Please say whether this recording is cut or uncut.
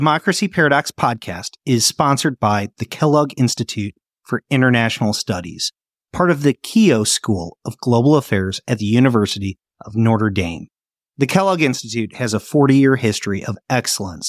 uncut